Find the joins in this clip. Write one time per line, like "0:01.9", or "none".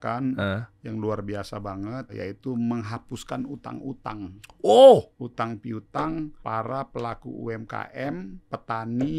0:02.1
0:05.2
0:06.4
0:08.4